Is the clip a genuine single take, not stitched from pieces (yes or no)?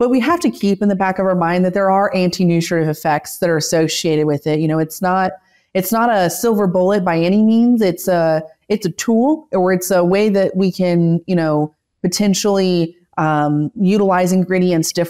yes